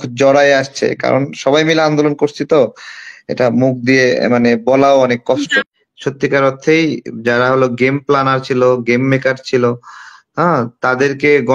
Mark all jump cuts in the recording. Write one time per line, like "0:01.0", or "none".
0:05.6